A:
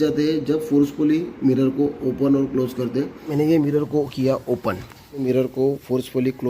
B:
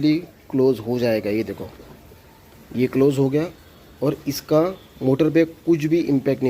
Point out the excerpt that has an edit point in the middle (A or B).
A